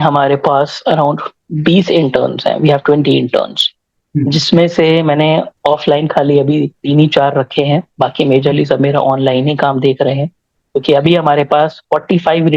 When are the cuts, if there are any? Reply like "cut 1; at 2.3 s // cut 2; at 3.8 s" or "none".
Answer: none